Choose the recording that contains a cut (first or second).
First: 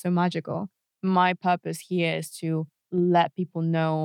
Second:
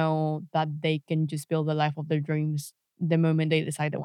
first